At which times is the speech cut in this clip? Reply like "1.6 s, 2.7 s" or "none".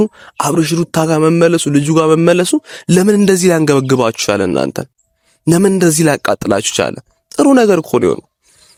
none